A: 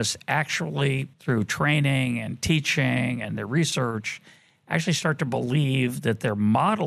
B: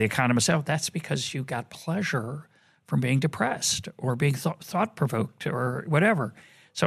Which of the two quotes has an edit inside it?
A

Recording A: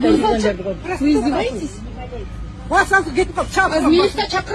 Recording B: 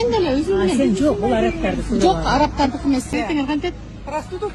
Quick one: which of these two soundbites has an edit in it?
B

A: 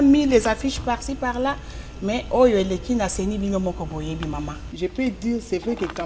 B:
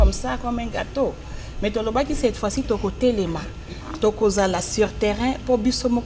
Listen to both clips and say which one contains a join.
A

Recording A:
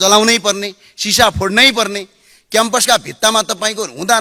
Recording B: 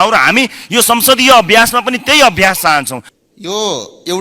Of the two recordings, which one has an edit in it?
B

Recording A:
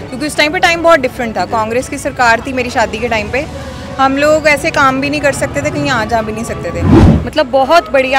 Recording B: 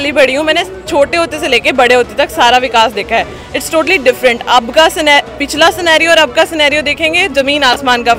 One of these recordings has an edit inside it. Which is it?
A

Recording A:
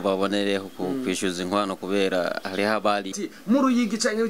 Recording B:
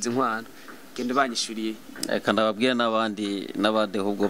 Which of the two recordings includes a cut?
A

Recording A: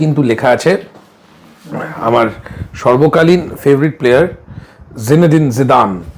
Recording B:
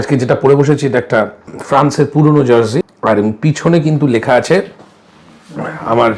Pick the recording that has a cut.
B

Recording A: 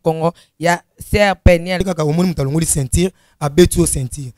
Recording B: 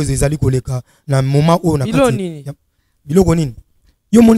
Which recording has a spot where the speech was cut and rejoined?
A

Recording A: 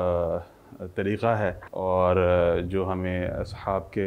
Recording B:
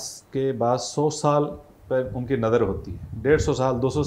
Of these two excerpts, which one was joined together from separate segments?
A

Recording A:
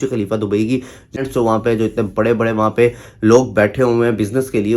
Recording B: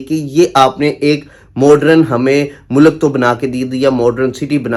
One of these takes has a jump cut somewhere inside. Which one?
A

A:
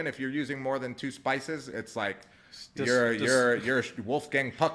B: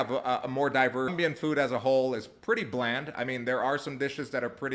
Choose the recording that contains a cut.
B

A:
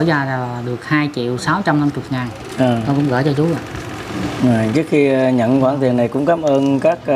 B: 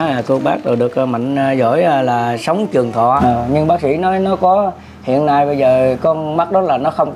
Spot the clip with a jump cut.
B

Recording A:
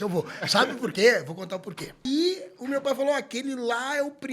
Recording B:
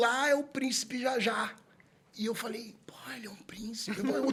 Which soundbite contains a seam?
A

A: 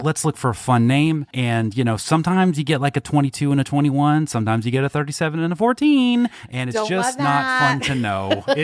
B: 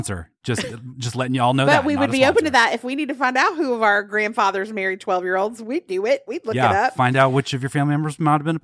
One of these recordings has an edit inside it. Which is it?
A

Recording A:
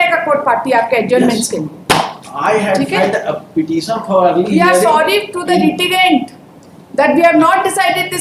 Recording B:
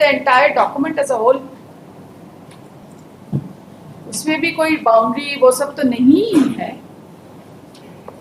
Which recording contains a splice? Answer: B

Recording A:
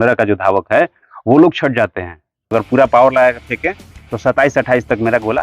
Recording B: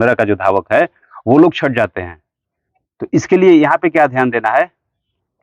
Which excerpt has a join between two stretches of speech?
A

